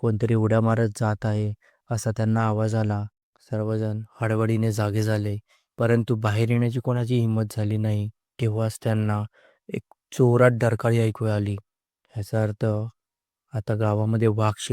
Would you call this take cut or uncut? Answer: cut